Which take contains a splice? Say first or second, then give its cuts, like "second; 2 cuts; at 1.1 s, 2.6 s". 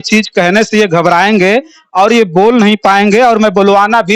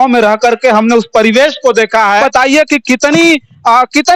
second; 1 cut; at 2.2 s